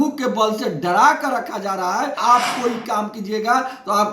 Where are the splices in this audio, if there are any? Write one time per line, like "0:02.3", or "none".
0:02.2